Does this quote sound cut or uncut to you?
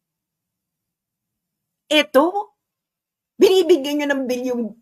uncut